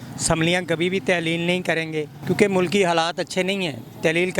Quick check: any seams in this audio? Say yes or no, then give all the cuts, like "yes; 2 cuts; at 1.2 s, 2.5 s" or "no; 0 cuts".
yes; 1 cut; at 2.1 s